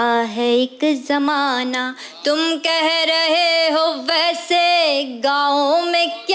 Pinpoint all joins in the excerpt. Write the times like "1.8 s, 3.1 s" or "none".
none